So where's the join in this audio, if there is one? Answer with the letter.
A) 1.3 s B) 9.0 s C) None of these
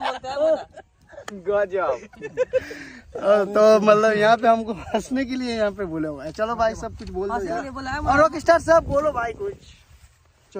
C